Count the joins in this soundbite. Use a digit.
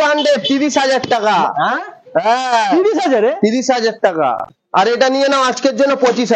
1